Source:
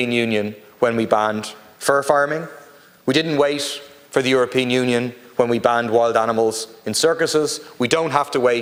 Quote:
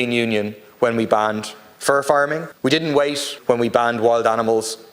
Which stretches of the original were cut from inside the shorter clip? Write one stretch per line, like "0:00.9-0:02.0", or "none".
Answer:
0:02.5-0:02.9
0:03.7-0:05.2